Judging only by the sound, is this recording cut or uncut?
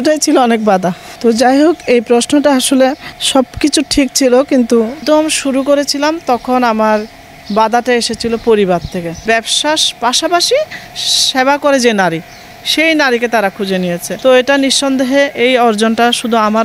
cut